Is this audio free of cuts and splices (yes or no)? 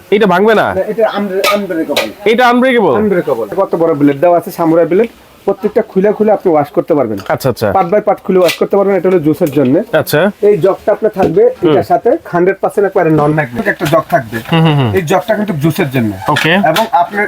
no